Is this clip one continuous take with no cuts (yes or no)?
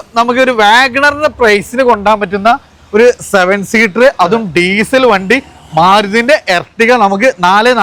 yes